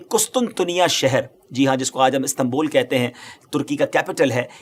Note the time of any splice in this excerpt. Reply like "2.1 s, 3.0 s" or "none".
none